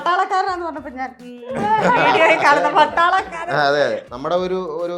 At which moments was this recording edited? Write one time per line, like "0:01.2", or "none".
0:04.1